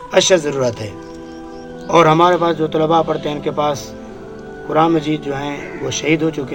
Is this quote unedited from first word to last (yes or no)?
yes